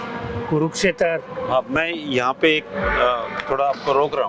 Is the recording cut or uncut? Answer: uncut